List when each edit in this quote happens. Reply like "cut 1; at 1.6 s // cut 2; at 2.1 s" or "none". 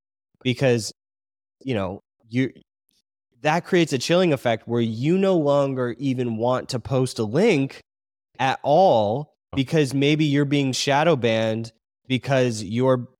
cut 1; at 9.5 s